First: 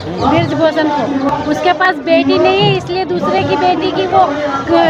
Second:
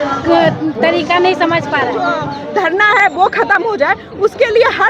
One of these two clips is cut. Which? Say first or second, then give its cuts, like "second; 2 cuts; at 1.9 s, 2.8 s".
second; 1 cut; at 2.3 s